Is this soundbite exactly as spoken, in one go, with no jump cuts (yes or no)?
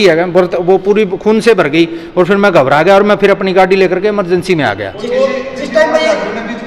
yes